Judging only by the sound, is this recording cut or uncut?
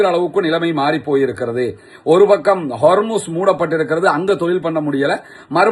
uncut